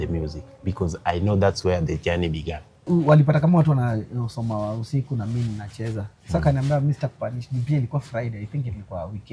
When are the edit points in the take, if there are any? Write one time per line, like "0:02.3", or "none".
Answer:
0:02.8